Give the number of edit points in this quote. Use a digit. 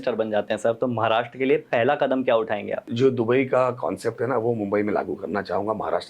1